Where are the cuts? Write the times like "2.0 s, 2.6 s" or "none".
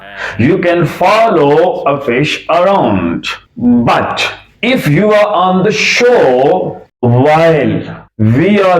6.8 s